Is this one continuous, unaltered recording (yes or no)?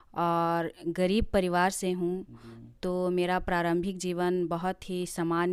yes